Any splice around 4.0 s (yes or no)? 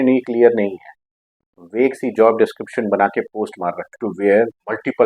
yes